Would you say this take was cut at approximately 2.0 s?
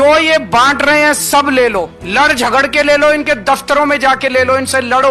yes; 1 cut; at 2.0 s

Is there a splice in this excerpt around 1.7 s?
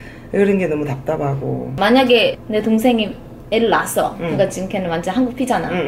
yes; 1 cut; at 1.7 s

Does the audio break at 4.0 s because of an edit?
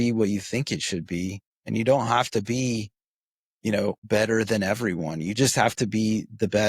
yes; 2 cuts; at 1.5 s, 4.0 s

